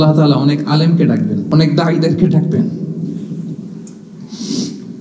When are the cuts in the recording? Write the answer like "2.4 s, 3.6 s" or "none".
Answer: 1.4 s